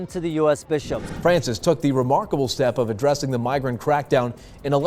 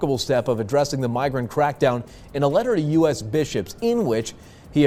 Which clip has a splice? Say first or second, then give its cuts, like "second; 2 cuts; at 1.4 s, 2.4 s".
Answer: first; 1 cut; at 1.0 s